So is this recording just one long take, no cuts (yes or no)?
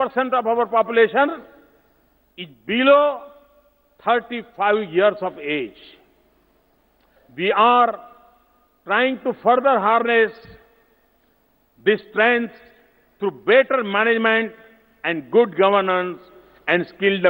yes